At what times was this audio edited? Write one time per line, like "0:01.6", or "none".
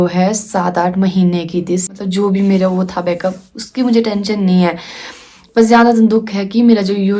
0:01.9